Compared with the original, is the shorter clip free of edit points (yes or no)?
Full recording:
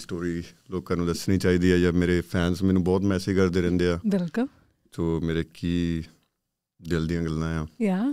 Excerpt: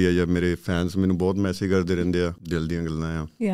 no